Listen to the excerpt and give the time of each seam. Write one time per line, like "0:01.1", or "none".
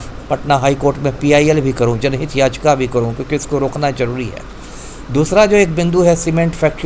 none